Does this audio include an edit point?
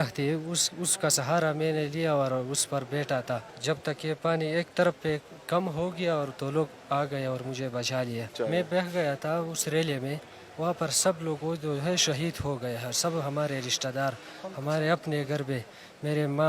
yes; 2 cuts; at 3.5 s, 8.3 s

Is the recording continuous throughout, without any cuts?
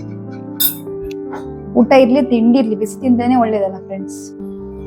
no; 2 cuts; at 1.7 s, 3.8 s

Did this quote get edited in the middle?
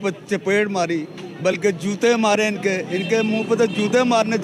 no; 0 cuts

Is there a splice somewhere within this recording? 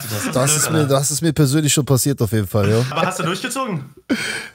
yes; 1 cut; at 2.9 s

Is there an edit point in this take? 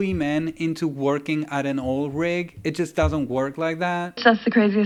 no; 0 cuts

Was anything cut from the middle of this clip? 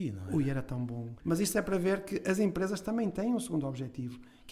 yes; 1 cut; at 1.1 s

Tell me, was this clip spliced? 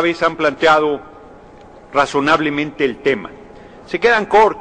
no; 0 cuts

